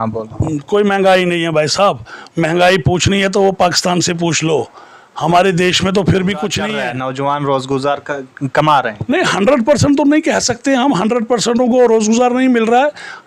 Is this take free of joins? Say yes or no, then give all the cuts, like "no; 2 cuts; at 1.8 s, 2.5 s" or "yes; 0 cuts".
no; 1 cut; at 6.8 s